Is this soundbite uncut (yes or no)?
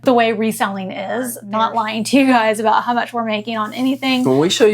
no